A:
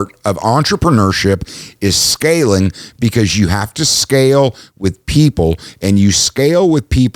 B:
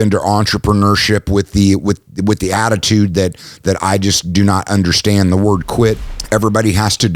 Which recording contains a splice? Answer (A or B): B